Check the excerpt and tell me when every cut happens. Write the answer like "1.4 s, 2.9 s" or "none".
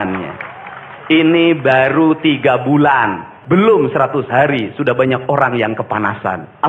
3.3 s